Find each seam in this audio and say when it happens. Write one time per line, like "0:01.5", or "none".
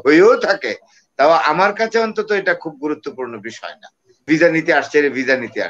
0:04.3